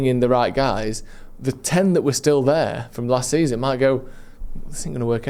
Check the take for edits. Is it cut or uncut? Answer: uncut